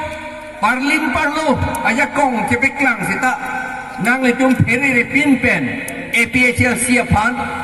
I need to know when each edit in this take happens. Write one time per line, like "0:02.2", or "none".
none

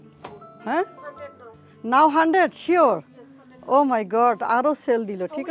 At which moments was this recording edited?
none

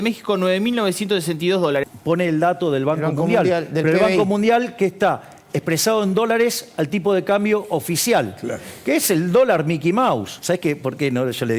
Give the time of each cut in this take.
0:01.9
0:10.3

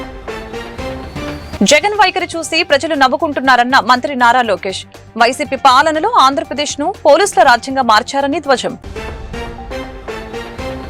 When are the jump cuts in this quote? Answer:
0:01.3

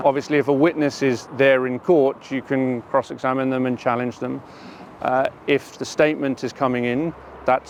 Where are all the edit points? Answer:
none

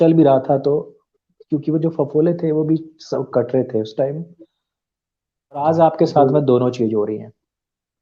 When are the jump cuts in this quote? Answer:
0:05.6

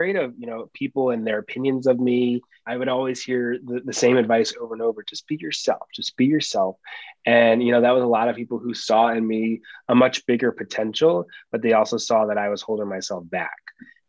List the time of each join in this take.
0:02.6

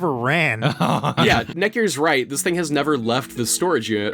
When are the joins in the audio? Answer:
0:01.0

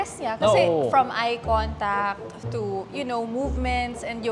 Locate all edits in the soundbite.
none

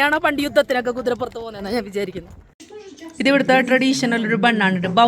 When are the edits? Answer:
0:02.6

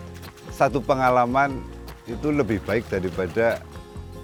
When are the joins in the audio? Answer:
none

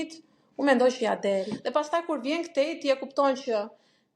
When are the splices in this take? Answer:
0:01.6

